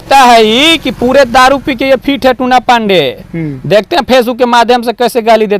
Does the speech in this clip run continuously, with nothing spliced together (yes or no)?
yes